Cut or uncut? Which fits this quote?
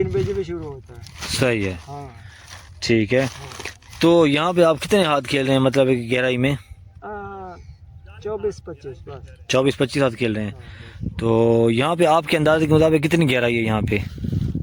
uncut